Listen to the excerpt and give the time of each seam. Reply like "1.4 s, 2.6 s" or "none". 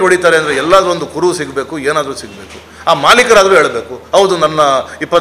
none